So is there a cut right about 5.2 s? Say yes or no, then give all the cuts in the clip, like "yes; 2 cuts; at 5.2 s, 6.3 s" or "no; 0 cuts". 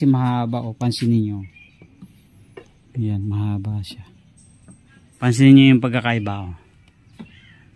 yes; 1 cut; at 5.2 s